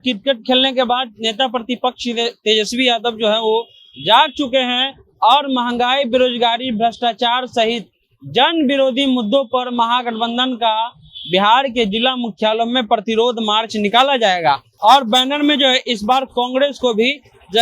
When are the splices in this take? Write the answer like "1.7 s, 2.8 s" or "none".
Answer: 14.7 s